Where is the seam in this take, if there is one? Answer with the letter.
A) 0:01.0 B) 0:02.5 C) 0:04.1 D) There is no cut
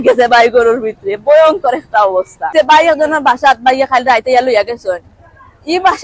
B